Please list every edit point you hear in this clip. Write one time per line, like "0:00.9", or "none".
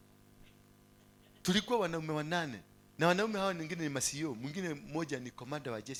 none